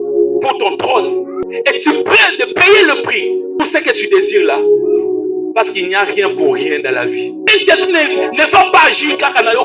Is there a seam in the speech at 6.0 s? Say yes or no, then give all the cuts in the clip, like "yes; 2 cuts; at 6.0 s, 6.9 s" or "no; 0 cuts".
no; 2 cuts; at 1.5 s, 7.5 s